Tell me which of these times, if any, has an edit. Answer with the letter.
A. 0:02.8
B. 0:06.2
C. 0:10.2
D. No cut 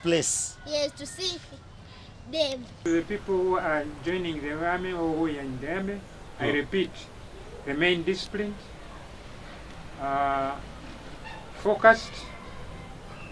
A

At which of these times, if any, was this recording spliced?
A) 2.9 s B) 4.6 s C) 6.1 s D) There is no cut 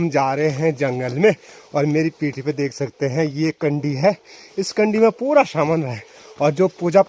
D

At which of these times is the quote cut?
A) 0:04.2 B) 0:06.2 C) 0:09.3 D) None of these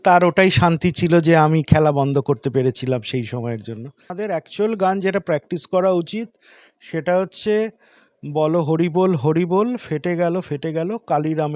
A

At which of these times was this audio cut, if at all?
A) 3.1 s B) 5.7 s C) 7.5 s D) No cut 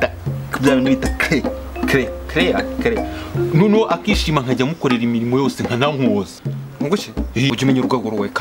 C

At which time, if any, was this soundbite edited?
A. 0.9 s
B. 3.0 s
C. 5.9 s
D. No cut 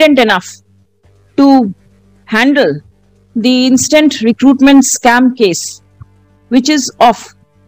D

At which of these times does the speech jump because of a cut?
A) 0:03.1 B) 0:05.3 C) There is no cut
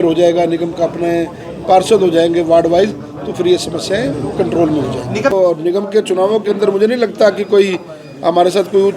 B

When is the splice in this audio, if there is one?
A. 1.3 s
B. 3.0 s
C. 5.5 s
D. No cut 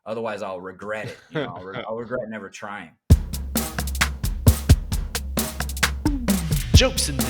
B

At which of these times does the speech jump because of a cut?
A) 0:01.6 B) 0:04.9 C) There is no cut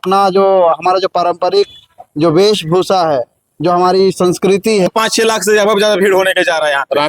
B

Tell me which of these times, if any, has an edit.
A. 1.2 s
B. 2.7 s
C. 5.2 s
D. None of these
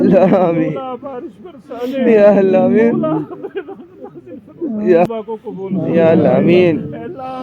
C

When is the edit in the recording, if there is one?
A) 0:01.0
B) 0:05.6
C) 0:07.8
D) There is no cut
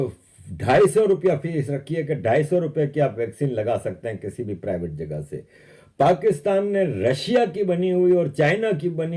D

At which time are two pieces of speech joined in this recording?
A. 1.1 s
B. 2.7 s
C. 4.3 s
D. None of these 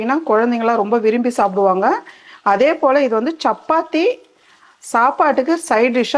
D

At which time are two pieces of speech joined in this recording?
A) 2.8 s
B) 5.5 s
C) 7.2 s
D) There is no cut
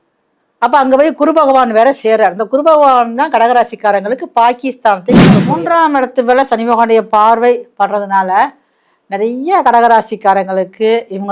B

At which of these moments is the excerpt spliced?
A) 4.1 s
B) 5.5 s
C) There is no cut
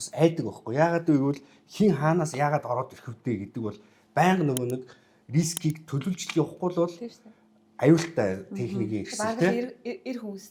C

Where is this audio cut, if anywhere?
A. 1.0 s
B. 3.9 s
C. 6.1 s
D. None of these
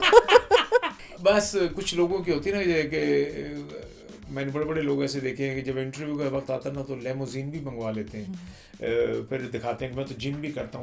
A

